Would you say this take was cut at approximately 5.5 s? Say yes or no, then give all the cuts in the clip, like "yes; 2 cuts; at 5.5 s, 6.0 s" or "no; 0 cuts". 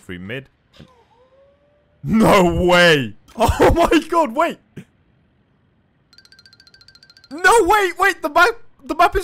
no; 1 cut; at 3.2 s